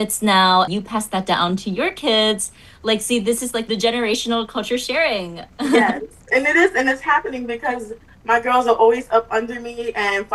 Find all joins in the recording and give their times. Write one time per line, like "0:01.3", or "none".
none